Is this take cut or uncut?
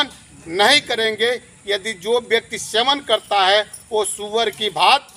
uncut